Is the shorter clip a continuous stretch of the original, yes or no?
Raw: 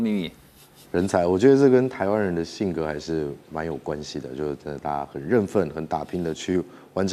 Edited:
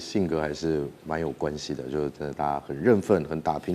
yes